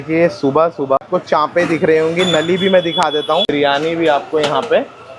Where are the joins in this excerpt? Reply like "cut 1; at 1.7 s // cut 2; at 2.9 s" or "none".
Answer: cut 1; at 1.1 s // cut 2; at 3.5 s